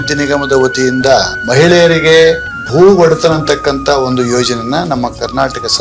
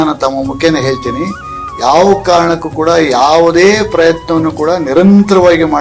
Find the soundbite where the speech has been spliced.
first; 2 cuts; at 1.4 s, 2.5 s

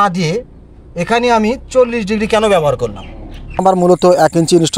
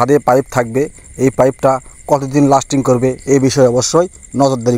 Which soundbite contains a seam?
first; 1 cut; at 3.6 s

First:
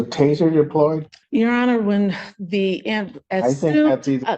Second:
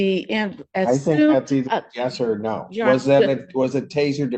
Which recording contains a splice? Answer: first; 1 cut; at 1.1 s

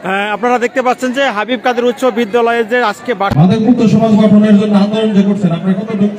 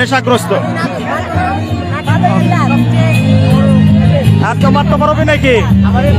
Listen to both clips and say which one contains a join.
first; 1 cut; at 3.3 s

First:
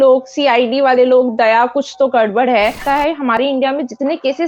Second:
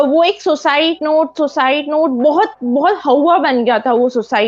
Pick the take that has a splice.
first; 1 cut; at 3.1 s

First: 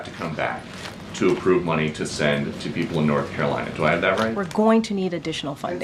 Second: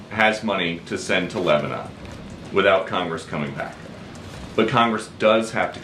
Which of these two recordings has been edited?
first; 1 cut; at 4.4 s

